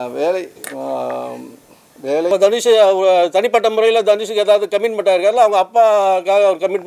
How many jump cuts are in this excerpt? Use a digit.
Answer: 1